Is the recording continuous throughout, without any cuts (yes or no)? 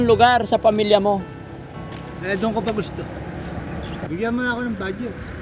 no